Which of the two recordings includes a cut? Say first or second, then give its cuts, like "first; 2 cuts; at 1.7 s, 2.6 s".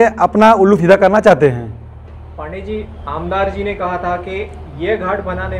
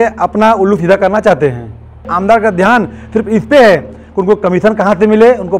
second; 1 cut; at 2.1 s